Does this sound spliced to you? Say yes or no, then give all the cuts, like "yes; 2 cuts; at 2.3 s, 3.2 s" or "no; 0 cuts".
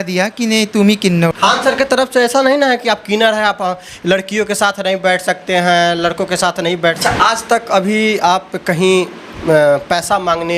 yes; 2 cuts; at 1.3 s, 7.0 s